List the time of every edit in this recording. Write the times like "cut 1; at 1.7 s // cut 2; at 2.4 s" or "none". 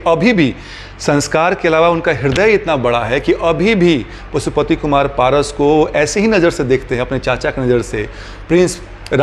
none